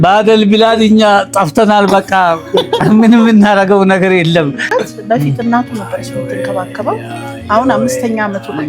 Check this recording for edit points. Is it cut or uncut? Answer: cut